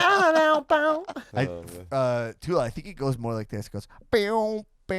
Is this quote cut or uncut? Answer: cut